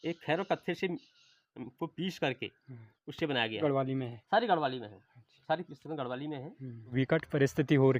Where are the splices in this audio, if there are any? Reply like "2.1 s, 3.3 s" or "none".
3.6 s, 6.9 s